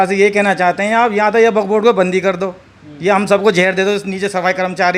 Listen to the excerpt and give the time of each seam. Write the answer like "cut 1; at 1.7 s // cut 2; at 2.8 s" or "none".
none